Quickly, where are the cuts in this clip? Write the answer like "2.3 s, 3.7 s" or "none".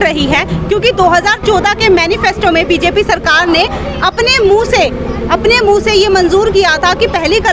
none